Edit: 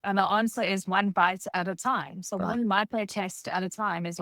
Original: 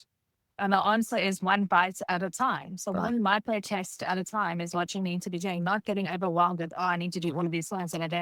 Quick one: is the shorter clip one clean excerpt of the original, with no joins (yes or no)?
yes